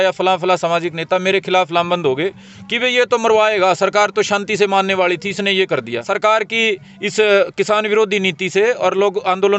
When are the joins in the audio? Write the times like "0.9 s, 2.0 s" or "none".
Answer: 6.0 s